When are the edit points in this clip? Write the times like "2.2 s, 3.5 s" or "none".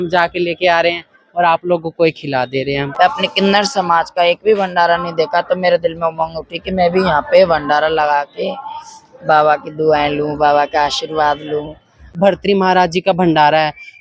2.9 s, 12.1 s